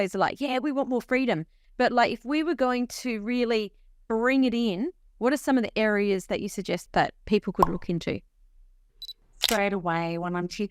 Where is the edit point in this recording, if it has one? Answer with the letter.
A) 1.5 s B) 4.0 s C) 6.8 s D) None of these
C